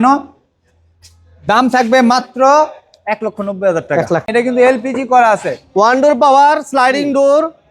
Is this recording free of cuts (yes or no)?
no